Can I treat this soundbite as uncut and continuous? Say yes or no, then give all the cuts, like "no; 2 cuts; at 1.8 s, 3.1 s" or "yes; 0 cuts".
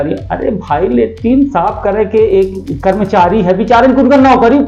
yes; 0 cuts